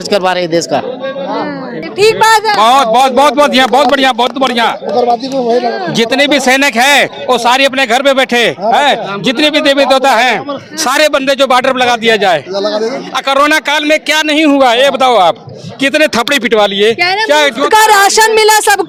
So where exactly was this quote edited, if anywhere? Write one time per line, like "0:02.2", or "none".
none

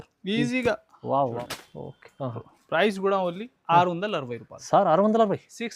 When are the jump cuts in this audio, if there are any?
0:01.4

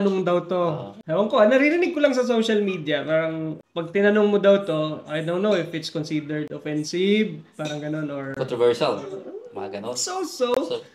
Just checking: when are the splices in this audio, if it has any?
0:00.9
0:03.6

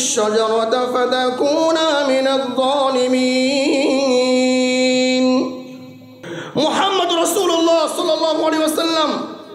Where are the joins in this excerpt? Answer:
0:06.2

